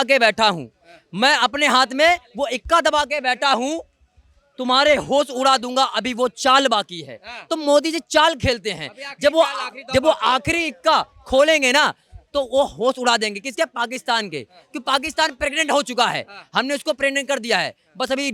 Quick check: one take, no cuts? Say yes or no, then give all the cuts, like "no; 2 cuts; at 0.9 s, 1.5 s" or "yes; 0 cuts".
yes; 0 cuts